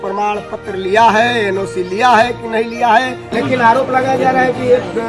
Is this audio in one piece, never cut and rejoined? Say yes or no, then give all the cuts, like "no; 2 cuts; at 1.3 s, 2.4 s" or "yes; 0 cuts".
no; 1 cut; at 3.3 s